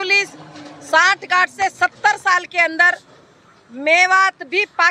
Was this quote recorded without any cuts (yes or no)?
yes